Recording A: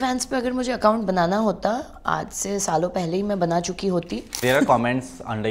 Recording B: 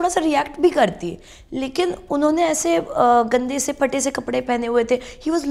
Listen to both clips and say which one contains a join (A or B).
A